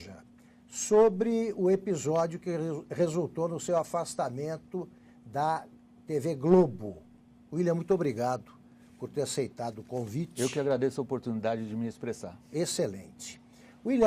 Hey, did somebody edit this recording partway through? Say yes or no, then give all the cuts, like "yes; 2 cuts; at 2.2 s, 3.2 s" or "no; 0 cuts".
no; 0 cuts